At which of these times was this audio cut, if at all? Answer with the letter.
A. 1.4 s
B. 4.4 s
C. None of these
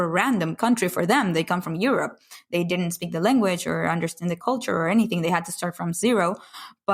B